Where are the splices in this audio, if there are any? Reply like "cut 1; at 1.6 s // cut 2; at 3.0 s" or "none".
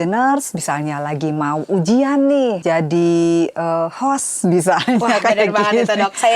cut 1; at 2.6 s